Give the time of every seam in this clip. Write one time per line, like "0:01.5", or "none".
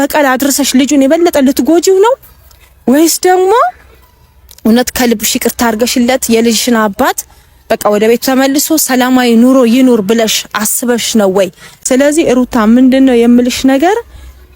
0:11.7